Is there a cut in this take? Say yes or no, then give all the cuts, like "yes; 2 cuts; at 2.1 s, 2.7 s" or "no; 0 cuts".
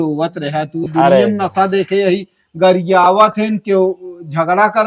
no; 0 cuts